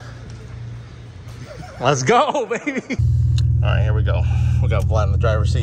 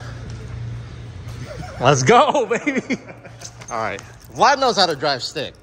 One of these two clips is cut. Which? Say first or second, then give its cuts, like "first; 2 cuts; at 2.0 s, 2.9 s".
first; 1 cut; at 3.1 s